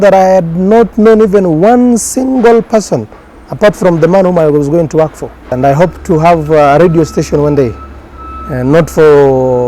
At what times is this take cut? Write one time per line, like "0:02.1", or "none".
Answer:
0:05.4